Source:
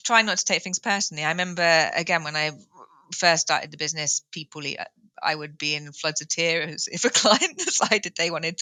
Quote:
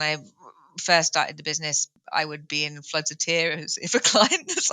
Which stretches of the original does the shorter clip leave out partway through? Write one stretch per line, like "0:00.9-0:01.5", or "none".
0:04.3-0:05.0